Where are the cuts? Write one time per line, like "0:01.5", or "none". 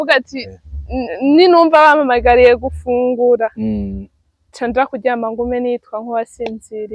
none